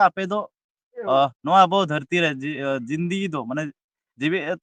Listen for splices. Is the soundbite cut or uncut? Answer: uncut